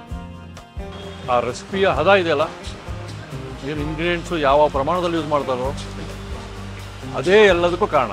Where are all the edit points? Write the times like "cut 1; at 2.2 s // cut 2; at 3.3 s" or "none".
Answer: cut 1; at 1.2 s